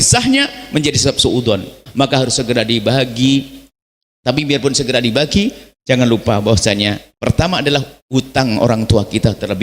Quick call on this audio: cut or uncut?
cut